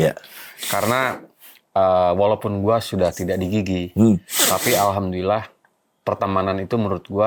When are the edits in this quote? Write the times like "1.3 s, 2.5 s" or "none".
none

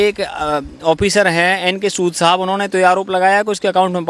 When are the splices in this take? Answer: none

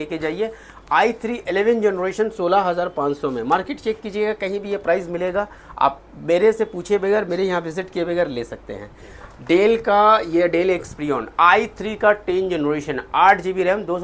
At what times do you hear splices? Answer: none

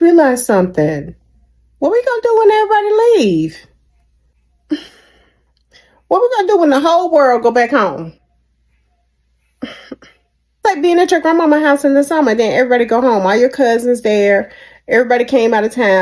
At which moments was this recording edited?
none

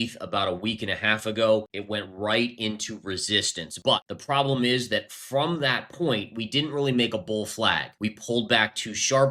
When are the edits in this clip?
1.7 s, 3.9 s, 7.9 s

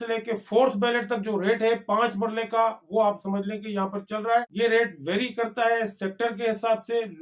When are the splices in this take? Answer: 4.5 s

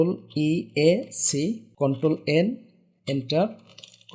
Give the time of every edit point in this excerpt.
1.7 s

